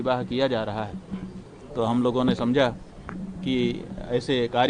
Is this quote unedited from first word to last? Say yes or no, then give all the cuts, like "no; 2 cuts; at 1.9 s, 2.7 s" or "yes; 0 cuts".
yes; 0 cuts